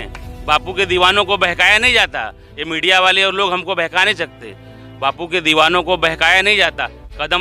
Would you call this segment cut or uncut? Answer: uncut